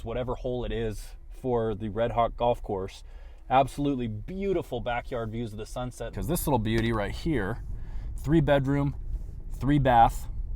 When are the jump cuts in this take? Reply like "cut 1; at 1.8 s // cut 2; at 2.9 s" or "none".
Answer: cut 1; at 6.1 s

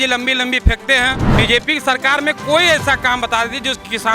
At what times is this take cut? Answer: cut 1; at 1.3 s

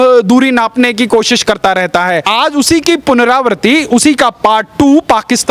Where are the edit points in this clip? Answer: cut 1; at 2.3 s

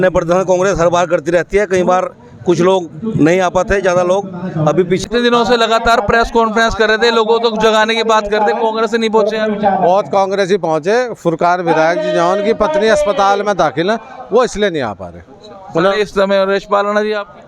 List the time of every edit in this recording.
cut 1; at 5.1 s

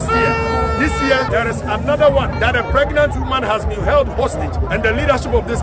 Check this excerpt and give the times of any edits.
cut 1; at 1.3 s // cut 2; at 2.3 s // cut 3; at 4.6 s

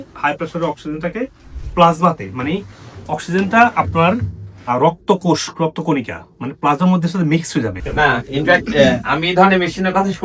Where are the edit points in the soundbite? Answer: cut 1; at 7.8 s

